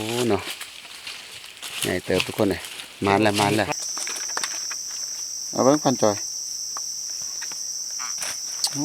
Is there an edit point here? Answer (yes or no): yes